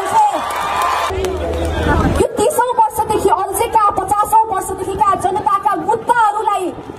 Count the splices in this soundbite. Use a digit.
1